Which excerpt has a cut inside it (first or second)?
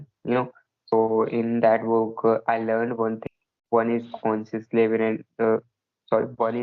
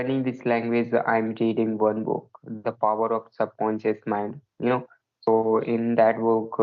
first